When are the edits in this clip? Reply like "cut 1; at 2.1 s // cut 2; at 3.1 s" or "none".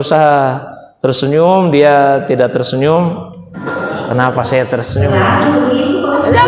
cut 1; at 3.5 s